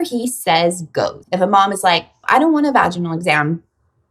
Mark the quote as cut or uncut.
cut